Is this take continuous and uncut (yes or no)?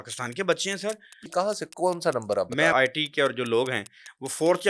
no